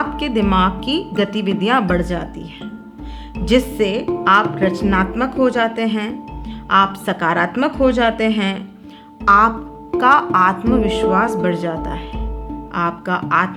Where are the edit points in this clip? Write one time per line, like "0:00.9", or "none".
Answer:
none